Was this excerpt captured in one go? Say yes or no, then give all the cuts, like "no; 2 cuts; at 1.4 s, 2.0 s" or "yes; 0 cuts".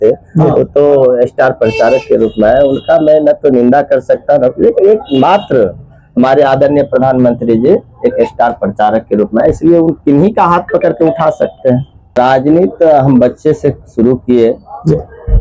no; 1 cut; at 12.2 s